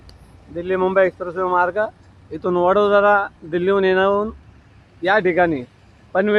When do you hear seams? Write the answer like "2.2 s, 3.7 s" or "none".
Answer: none